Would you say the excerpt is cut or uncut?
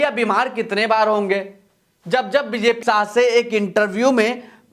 cut